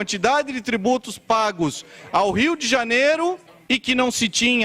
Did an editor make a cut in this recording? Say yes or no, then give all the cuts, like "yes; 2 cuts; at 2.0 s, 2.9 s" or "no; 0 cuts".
yes; 1 cut; at 3.5 s